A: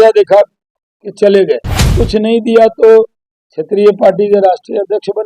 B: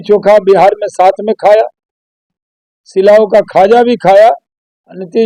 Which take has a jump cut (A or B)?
A